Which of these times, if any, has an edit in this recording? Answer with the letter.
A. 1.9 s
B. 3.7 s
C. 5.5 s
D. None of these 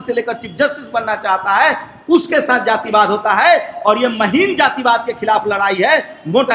D